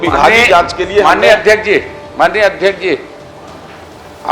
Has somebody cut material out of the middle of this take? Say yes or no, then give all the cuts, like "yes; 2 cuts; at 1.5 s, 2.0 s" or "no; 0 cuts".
no; 0 cuts